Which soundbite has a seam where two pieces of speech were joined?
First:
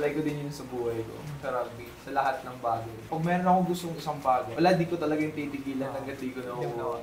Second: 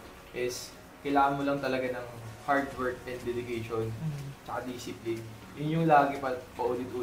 first; 3 cuts; at 1.4 s, 3.1 s, 4.5 s

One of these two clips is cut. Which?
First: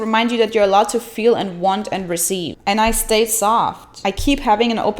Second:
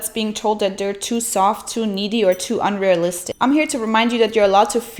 first; 1 cut; at 2.5 s

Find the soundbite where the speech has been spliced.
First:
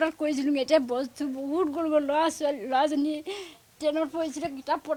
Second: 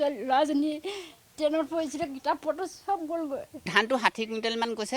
second; 1 cut; at 3.7 s

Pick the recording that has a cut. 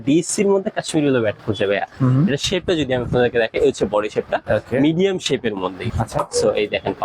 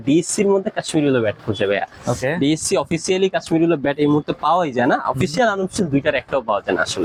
first; 2 cuts; at 1.9 s, 5.9 s

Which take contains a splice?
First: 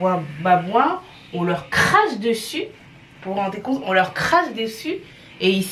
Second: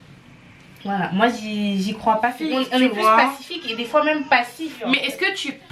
second; 2 cuts; at 2.4 s, 4.7 s

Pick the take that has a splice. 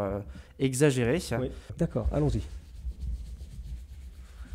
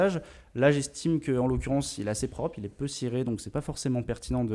first; 1 cut; at 1.6 s

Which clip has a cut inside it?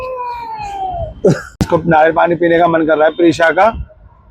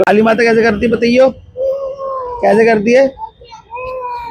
first; 1 cut; at 1.4 s

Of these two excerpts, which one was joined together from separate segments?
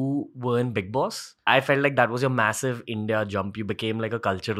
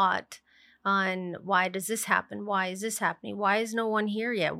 first; 1 cut; at 1.4 s

